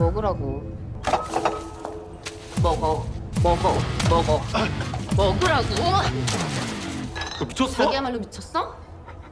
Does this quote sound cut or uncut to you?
cut